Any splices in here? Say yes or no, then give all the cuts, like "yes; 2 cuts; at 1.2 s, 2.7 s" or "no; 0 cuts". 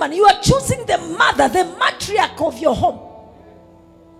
no; 0 cuts